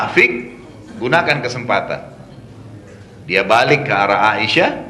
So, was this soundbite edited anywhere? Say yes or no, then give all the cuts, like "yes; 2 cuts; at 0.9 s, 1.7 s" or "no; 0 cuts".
no; 0 cuts